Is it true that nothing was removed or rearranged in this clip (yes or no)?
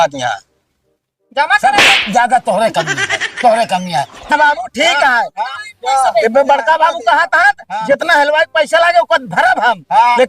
no